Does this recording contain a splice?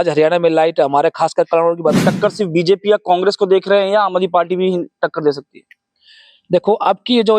yes; 1 cut; at 2.0 s

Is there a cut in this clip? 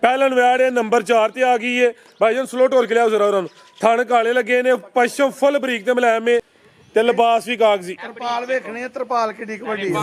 yes; 1 cut; at 6.6 s

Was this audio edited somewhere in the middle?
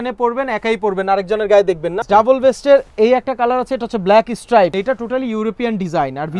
yes; 2 cuts; at 2.0 s, 4.7 s

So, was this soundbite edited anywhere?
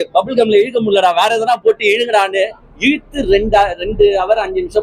no; 0 cuts

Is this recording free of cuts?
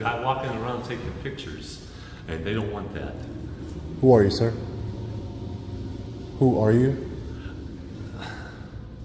yes; 0 cuts

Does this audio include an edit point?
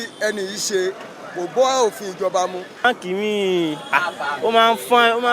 yes; 1 cut; at 2.8 s

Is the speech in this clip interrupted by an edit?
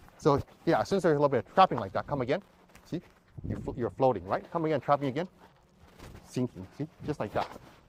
no; 0 cuts

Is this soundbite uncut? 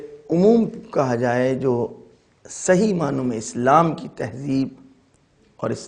yes; 0 cuts

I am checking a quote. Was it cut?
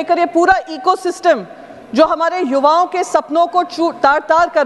no; 0 cuts

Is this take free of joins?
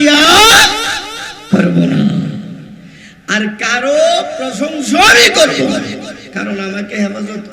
yes; 0 cuts

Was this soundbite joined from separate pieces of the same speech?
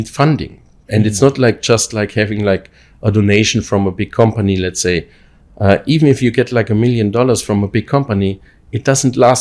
no; 0 cuts

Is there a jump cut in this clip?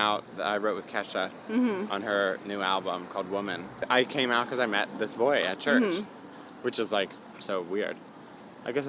yes; 1 cut; at 3.8 s

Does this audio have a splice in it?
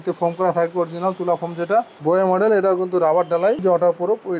yes; 2 cuts; at 1.9 s, 3.6 s

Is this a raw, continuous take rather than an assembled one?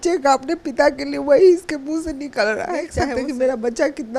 no; 1 cut; at 3.0 s

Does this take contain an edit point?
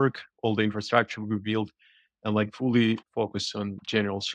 no; 0 cuts

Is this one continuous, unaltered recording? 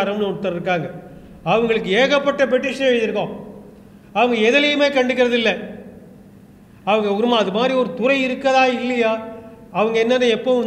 yes; 0 cuts

